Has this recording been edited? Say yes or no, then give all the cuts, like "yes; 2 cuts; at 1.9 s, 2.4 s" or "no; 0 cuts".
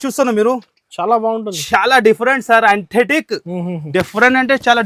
no; 0 cuts